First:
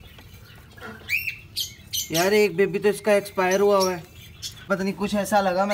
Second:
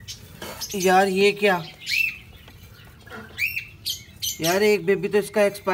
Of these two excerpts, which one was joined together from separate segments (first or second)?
first